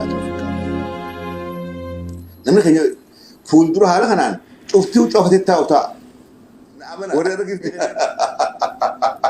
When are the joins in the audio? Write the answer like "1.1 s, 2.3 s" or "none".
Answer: 7.6 s